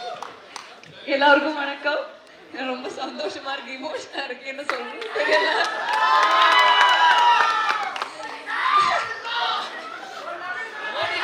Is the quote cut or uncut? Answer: uncut